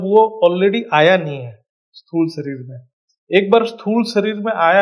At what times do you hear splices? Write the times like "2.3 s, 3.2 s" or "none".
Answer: none

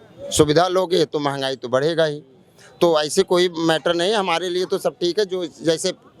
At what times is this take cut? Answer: none

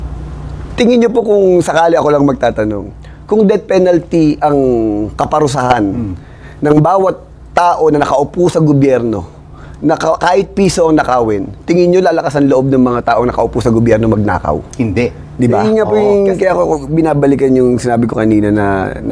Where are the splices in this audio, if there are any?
15.6 s

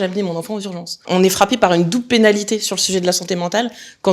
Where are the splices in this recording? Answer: 0.9 s

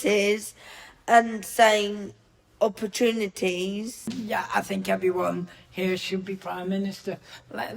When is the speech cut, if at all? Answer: 4.1 s

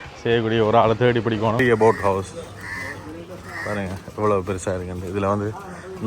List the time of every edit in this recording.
1.6 s

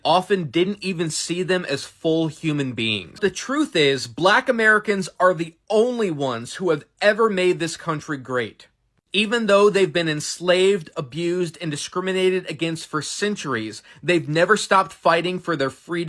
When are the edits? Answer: 3.2 s

